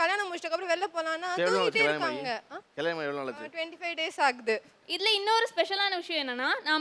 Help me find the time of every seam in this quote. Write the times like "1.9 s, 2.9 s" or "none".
4.8 s